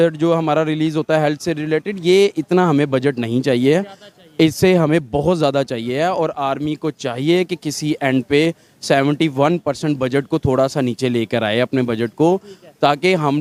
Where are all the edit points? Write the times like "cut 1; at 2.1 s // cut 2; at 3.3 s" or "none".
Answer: none